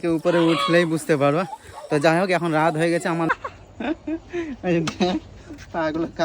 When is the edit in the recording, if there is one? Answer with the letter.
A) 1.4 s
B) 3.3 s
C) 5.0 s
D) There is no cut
B